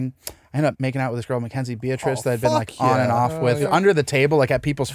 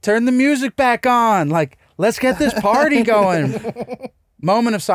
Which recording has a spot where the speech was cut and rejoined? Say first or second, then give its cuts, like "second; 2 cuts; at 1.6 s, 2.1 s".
first; 2 cuts; at 0.8 s, 3.6 s